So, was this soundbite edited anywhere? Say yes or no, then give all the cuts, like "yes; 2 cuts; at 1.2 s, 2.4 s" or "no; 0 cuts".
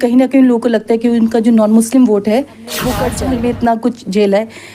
yes; 1 cut; at 3.1 s